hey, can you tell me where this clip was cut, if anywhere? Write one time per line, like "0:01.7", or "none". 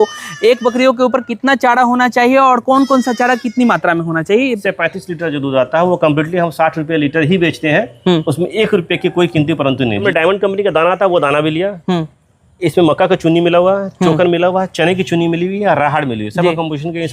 0:04.5
0:10.0